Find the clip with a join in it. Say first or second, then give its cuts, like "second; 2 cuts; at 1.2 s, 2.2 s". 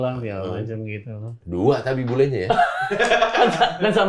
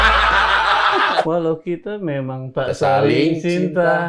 second; 1 cut; at 1.2 s